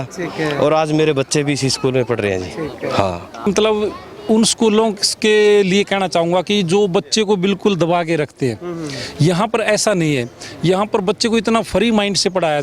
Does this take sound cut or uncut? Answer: cut